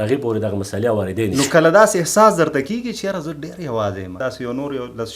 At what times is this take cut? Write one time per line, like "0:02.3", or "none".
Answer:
0:01.3
0:04.1